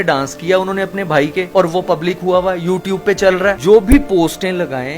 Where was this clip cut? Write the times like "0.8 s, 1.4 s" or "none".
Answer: none